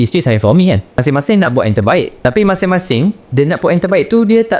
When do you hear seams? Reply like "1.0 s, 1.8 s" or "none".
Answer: 0.9 s, 2.1 s, 3.2 s